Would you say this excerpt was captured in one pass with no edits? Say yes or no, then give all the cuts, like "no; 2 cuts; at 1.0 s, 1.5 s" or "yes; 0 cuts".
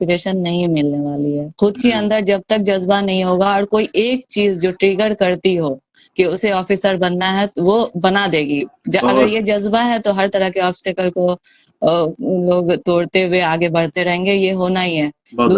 yes; 0 cuts